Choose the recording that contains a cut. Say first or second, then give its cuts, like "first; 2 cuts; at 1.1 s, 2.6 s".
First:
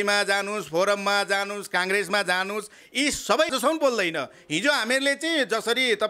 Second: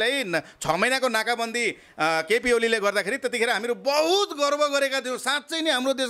first; 1 cut; at 3.5 s